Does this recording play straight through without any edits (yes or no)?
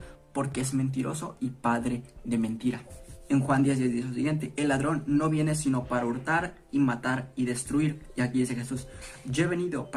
yes